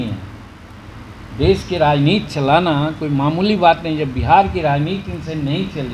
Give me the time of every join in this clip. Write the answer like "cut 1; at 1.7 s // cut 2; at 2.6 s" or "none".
none